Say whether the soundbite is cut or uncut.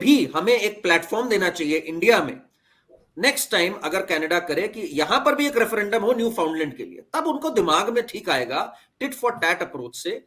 uncut